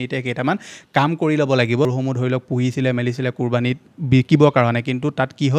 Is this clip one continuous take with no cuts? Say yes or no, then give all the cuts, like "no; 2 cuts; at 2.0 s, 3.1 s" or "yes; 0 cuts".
no; 1 cut; at 1.8 s